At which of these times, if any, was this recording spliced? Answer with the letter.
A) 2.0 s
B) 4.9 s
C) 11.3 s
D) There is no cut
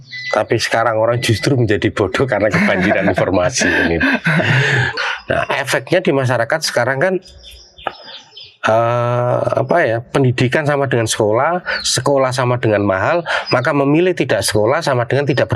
B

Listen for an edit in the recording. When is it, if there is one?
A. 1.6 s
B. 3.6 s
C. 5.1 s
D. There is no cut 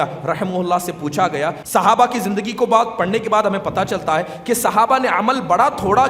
A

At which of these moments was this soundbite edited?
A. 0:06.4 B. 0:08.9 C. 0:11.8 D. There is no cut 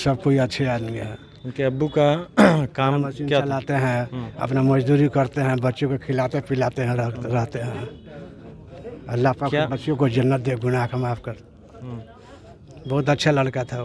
D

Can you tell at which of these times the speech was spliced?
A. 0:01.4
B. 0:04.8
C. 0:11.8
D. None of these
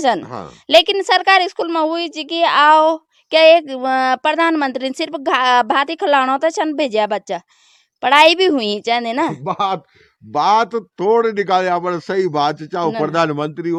D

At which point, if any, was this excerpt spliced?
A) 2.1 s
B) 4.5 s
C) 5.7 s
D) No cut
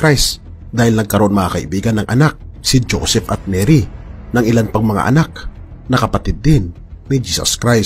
B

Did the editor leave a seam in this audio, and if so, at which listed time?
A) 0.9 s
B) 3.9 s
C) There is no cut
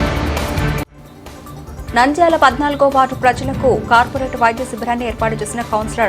A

